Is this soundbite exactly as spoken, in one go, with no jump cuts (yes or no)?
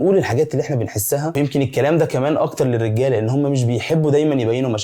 yes